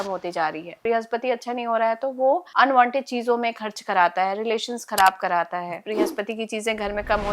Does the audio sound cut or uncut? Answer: cut